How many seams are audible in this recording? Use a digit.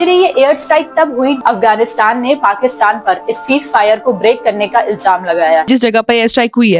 2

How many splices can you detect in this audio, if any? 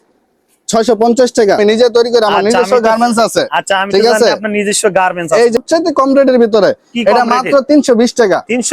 2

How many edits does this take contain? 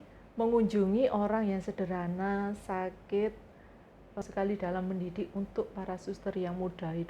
1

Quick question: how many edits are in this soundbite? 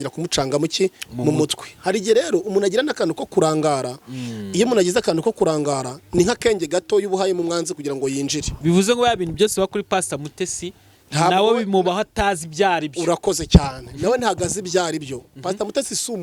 0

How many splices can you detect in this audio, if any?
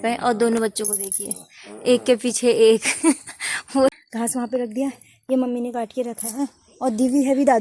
1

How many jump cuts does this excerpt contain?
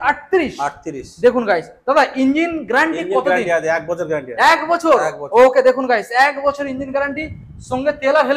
0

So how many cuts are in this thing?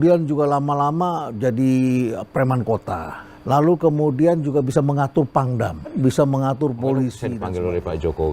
1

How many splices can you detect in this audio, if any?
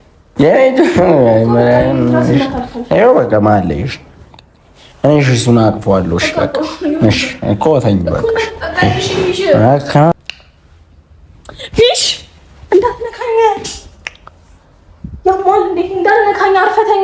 1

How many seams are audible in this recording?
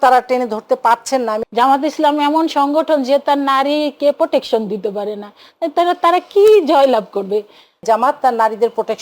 2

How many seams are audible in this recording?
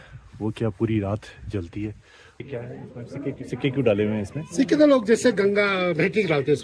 1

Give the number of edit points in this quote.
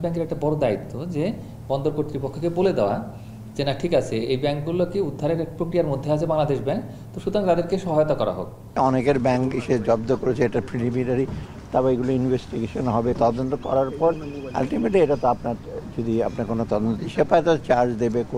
2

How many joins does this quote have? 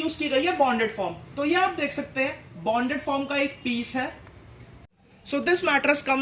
0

